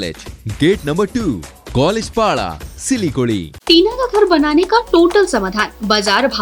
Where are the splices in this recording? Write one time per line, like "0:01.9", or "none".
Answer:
0:03.5